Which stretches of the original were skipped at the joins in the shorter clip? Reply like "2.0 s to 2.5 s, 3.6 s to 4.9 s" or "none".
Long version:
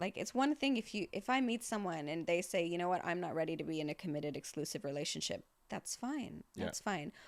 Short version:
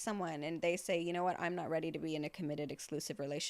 none